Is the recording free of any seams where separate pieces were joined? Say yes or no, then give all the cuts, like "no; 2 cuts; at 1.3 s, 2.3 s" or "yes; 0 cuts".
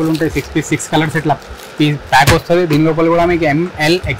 yes; 0 cuts